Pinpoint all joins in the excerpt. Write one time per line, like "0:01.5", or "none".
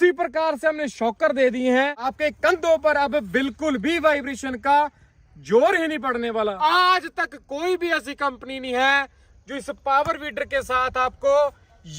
0:02.1
0:06.6